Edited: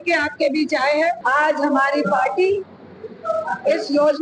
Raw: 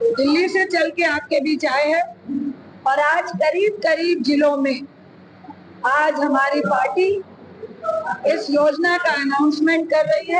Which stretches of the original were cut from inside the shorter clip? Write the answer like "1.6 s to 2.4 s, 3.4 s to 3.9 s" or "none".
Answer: 2.1 s to 5.8 s